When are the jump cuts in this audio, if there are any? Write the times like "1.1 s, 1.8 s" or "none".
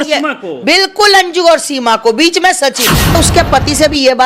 3.1 s

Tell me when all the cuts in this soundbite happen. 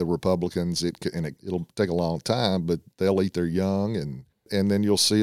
1.3 s, 2.9 s, 4.5 s

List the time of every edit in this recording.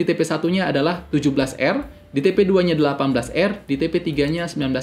none

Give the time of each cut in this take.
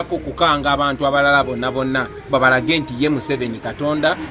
none

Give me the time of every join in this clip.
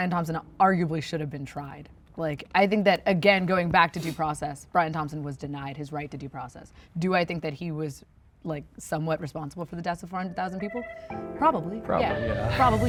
none

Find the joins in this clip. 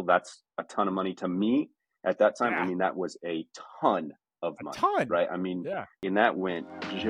5.9 s

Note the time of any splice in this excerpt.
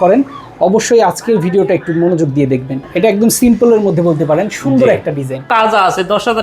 2.8 s, 5.5 s

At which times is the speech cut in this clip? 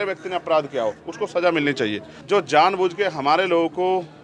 2.1 s

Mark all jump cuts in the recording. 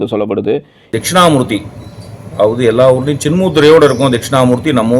0.9 s

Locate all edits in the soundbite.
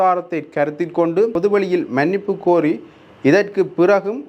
1.3 s

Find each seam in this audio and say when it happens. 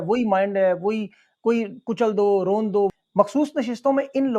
2.9 s

